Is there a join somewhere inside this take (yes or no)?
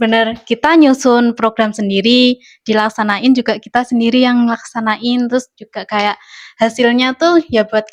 no